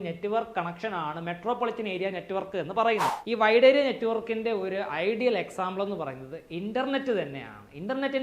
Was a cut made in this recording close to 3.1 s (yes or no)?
yes